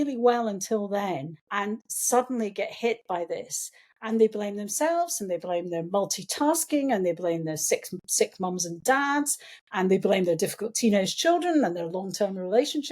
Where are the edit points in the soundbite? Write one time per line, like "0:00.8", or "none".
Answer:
0:01.4